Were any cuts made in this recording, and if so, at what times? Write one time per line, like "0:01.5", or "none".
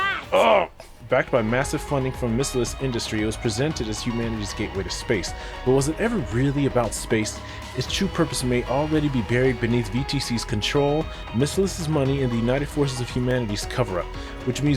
0:00.9